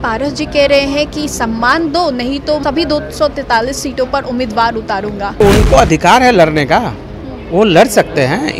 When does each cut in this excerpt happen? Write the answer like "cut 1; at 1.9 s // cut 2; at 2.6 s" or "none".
cut 1; at 2.6 s // cut 2; at 5.4 s